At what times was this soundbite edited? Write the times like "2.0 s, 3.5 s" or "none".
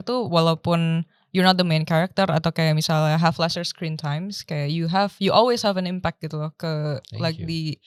none